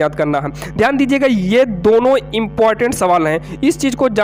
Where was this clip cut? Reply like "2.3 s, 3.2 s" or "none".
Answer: none